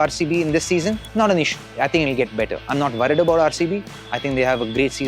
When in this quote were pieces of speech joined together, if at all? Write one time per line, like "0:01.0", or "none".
0:01.0
0:01.6